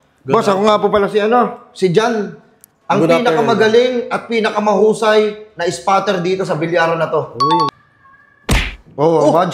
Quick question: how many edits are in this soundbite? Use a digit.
1